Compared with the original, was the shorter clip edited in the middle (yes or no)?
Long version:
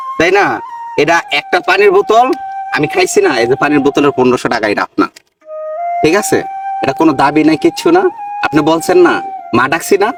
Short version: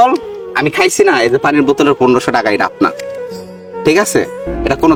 no